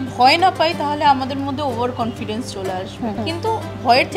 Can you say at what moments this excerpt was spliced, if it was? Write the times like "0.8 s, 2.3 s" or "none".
3.2 s